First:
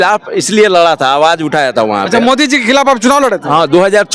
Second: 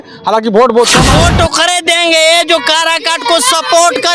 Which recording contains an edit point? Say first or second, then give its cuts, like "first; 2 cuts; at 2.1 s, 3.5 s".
second; 1 cut; at 1.1 s